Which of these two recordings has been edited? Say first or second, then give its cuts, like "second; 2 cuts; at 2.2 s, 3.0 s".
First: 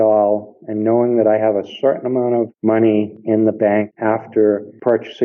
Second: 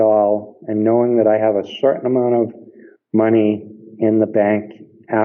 first; 2 cuts; at 3.0 s, 3.9 s